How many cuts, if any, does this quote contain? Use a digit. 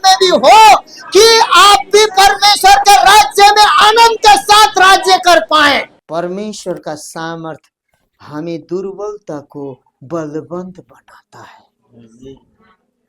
1